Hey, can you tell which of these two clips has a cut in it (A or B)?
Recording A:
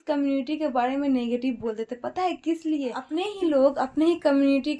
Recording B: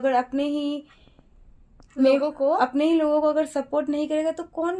A